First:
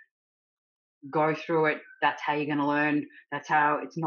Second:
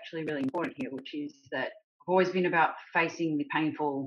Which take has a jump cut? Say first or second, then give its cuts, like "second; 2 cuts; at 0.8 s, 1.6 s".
second; 1 cut; at 1.9 s